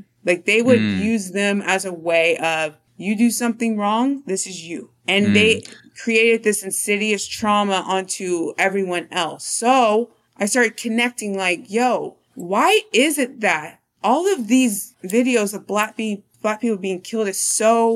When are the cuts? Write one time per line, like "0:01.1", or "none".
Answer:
none